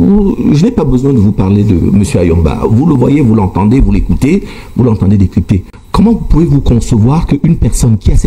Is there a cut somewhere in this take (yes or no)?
no